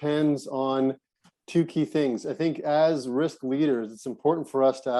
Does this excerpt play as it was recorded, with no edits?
yes; 0 cuts

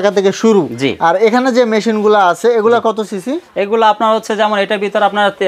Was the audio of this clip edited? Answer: no; 0 cuts

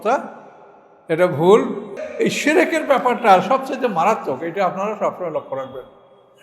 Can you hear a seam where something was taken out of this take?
yes; 1 cut; at 2.0 s

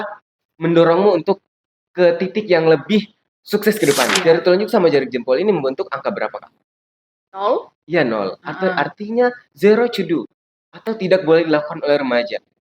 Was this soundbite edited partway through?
yes; 1 cut; at 4.2 s

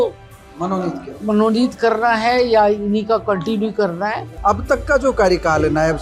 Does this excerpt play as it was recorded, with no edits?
no; 1 cut; at 4.3 s

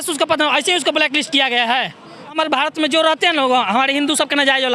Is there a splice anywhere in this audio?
yes; 1 cut; at 2.4 s

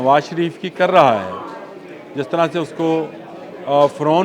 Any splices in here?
no; 0 cuts

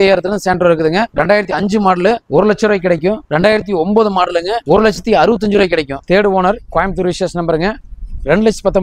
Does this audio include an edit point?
yes; 5 cuts; at 1.1 s, 2.2 s, 3.2 s, 4.6 s, 6.0 s

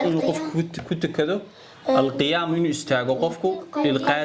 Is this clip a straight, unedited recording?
yes; 0 cuts

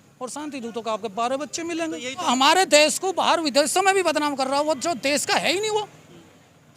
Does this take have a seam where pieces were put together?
yes; 1 cut; at 2.3 s

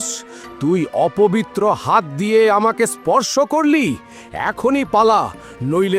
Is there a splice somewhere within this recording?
no; 0 cuts

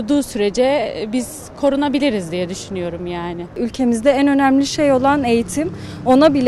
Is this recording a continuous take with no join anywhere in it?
no; 1 cut; at 3.6 s

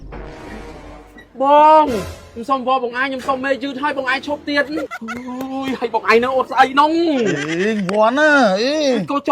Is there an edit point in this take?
yes; 1 cut; at 4.9 s

